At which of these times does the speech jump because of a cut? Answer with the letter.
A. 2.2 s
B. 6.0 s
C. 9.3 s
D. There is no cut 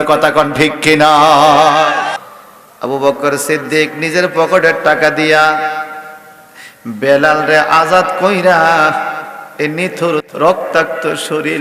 A